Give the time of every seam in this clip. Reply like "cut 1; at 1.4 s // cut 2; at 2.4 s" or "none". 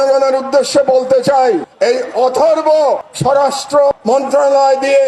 cut 1; at 3.1 s // cut 2; at 3.9 s

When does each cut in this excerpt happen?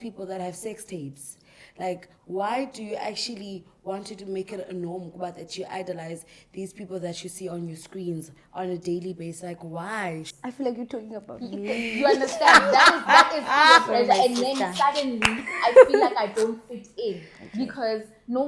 cut 1; at 10.3 s

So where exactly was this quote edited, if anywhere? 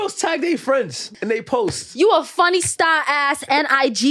cut 1; at 1.0 s

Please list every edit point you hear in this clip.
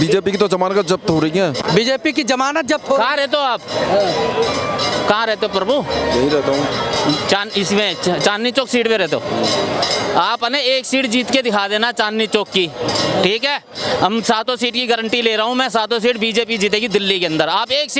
none

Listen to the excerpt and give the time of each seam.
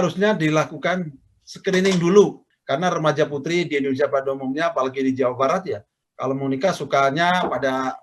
cut 1; at 2.5 s

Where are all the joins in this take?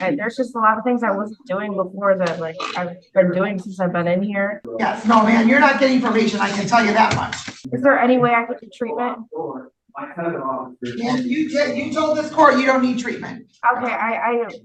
cut 1; at 4.6 s // cut 2; at 7.6 s

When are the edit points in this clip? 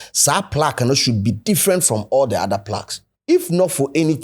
cut 1; at 3.1 s

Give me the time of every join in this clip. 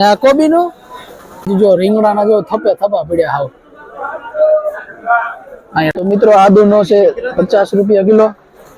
cut 1; at 1.5 s // cut 2; at 5.9 s

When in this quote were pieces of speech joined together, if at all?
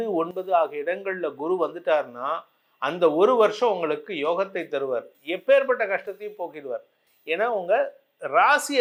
none

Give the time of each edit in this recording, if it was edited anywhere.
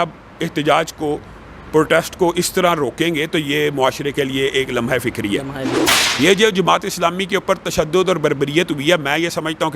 cut 1; at 5.7 s

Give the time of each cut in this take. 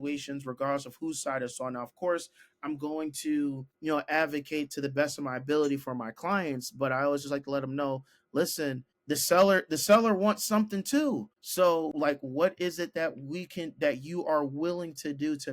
cut 1; at 3.7 s // cut 2; at 8.9 s // cut 3; at 11.4 s // cut 4; at 11.9 s

